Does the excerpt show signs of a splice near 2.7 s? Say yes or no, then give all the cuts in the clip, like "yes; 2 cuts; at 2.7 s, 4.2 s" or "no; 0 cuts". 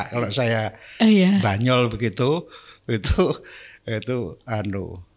no; 0 cuts